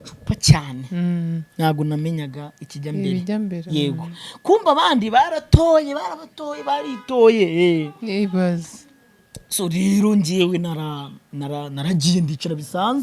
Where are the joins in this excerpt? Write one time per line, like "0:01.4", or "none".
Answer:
none